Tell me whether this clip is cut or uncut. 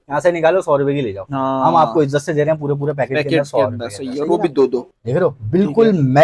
cut